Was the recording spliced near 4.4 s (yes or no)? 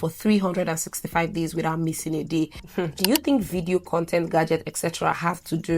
no